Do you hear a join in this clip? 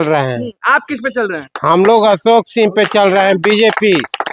no; 0 cuts

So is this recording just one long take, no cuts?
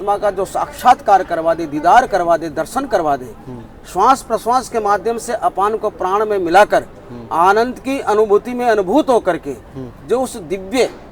yes; 0 cuts

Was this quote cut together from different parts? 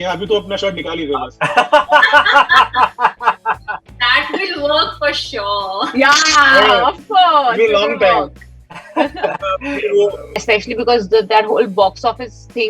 yes; 1 cut; at 10.4 s

